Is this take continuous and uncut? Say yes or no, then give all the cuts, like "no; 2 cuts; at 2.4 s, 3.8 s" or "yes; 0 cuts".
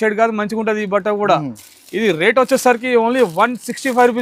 yes; 0 cuts